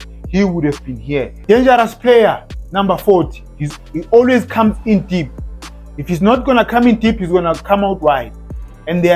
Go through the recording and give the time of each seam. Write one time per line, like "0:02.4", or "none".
0:01.4